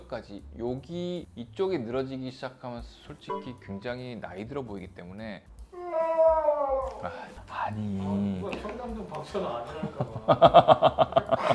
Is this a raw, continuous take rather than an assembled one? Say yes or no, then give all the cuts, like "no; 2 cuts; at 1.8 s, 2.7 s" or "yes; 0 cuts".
no; 2 cuts; at 5.5 s, 7.4 s